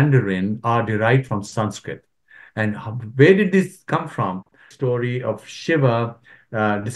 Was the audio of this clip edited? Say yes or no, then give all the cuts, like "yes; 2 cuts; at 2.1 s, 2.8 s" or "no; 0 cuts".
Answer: yes; 1 cut; at 4.7 s